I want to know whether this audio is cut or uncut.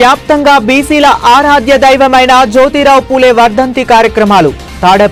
uncut